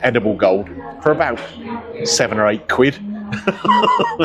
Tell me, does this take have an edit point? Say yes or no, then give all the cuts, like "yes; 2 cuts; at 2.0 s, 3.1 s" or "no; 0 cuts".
no; 0 cuts